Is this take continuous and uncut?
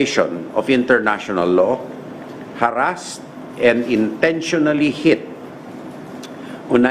yes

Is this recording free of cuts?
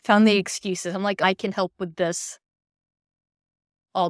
no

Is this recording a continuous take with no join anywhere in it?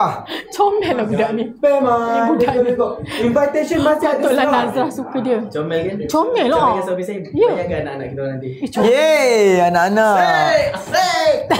yes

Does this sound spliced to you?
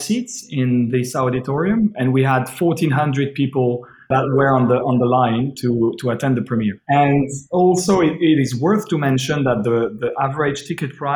yes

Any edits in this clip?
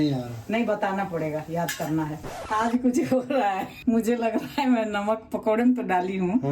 yes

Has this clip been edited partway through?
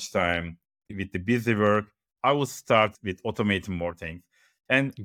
yes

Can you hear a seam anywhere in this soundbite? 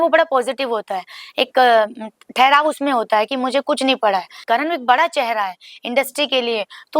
yes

